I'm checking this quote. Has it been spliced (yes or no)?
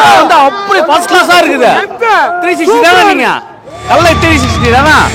no